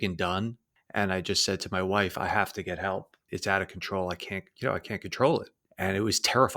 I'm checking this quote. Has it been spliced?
yes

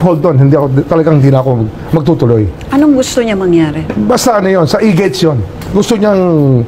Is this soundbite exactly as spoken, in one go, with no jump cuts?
yes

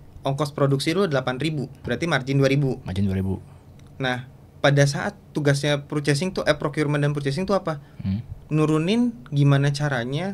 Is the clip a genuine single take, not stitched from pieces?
no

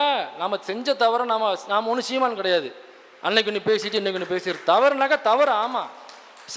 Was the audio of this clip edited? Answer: no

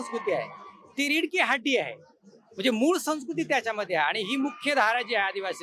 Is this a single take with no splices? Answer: yes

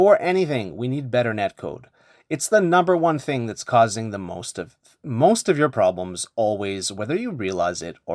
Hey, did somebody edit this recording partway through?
no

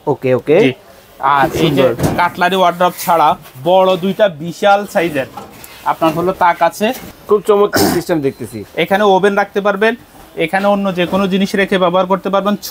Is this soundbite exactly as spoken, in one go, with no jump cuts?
no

